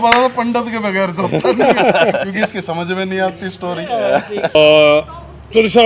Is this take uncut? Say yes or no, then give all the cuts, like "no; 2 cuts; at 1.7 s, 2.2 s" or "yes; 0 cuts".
no; 1 cut; at 4.5 s